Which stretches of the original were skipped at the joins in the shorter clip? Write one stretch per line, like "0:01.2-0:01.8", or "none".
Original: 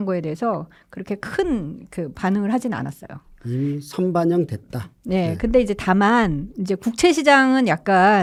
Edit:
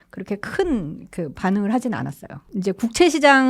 0:03.2-0:06.5